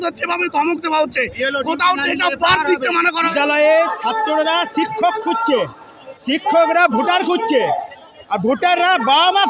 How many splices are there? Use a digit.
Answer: 1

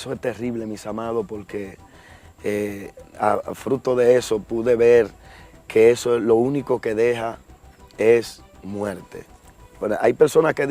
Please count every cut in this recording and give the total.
1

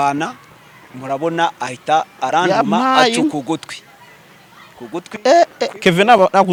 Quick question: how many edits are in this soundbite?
0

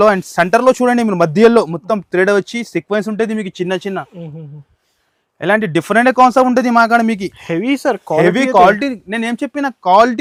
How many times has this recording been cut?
0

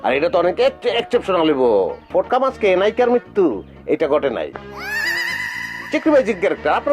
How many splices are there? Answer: 1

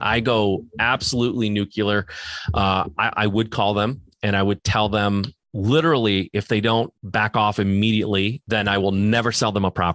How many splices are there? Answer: 3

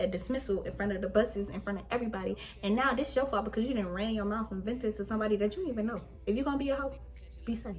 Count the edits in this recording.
1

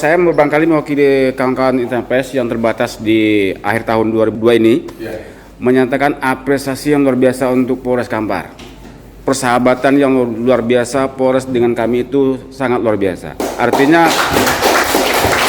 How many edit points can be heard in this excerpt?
1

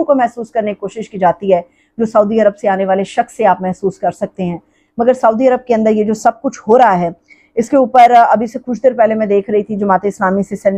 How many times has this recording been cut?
0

